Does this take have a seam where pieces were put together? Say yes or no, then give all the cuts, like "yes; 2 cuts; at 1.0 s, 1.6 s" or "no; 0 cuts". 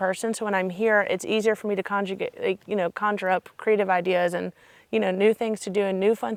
no; 0 cuts